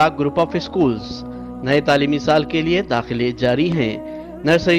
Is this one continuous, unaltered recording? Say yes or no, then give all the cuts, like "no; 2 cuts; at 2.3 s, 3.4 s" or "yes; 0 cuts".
yes; 0 cuts